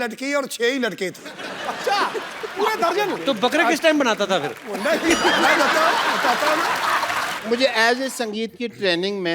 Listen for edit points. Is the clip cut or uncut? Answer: cut